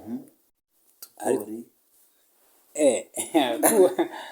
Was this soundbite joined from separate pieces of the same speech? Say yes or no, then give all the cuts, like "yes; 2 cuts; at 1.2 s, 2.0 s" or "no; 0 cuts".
no; 0 cuts